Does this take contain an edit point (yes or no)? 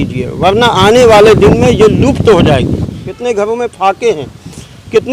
yes